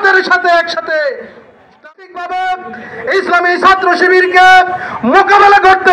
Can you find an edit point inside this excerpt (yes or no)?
yes